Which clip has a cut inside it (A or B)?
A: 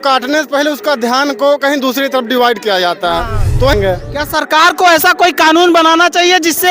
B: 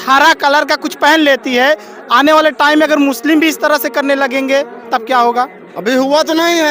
A